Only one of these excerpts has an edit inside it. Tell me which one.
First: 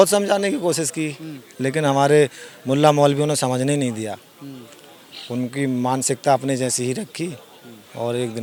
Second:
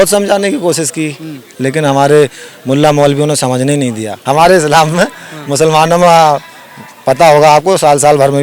second; 1 cut; at 4.1 s

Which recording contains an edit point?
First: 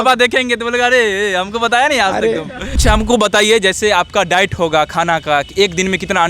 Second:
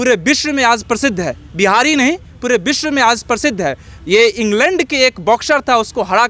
first; 1 cut; at 2.8 s

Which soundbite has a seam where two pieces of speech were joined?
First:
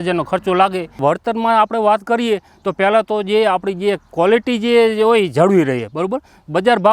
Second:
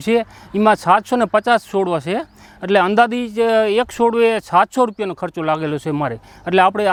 first; 1 cut; at 1.0 s

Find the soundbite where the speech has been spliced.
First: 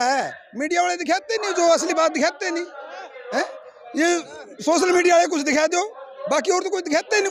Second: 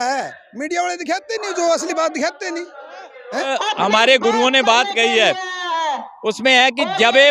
second; 1 cut; at 3.5 s

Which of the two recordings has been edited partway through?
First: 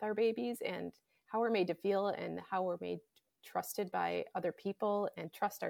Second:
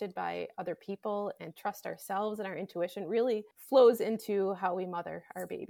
second; 1 cut; at 3.5 s

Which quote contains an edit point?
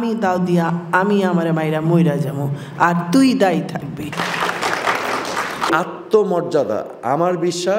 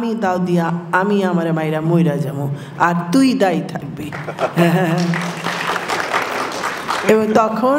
first; 2 cuts; at 4.1 s, 5.7 s

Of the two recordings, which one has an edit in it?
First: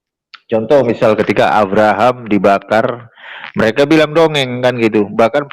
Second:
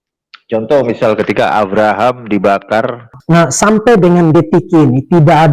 second; 1 cut; at 3.2 s

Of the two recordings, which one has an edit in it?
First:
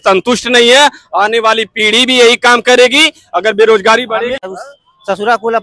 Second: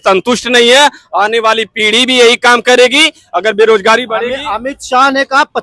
first; 1 cut; at 4.4 s

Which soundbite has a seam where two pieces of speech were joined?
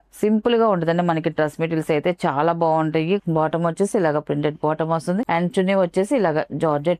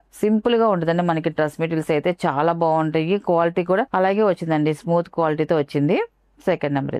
first; 2 cuts; at 3.2 s, 5.3 s

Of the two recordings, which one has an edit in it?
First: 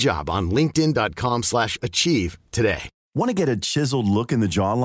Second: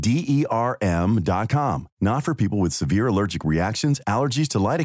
first; 1 cut; at 2.9 s

